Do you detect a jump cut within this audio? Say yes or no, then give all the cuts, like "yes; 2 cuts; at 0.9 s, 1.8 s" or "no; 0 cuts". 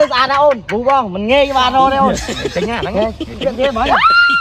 no; 0 cuts